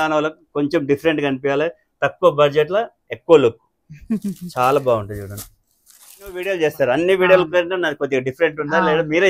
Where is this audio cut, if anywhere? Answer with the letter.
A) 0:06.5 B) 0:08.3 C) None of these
A